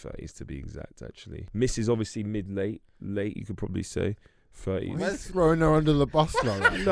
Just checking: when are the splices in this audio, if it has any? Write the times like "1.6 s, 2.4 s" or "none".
1.4 s

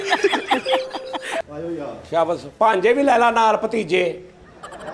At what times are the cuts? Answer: 1.4 s

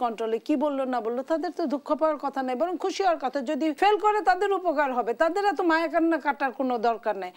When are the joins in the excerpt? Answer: 3.8 s

